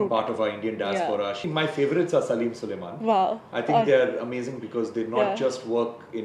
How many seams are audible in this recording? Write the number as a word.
one